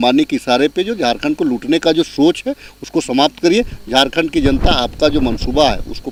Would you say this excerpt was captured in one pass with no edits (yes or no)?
yes